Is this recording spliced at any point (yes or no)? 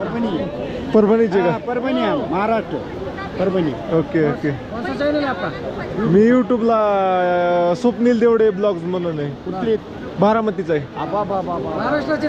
no